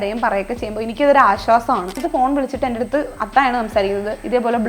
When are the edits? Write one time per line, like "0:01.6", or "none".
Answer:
0:02.0